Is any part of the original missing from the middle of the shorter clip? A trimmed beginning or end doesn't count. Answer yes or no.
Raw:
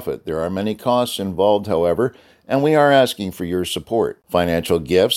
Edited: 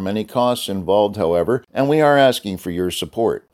yes